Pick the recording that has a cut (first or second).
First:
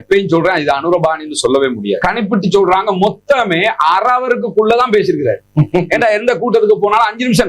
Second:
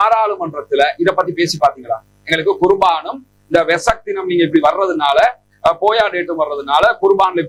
first